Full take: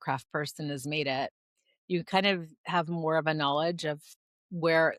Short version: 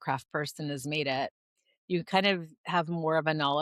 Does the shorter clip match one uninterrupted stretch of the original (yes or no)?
yes